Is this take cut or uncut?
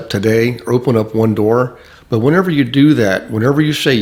uncut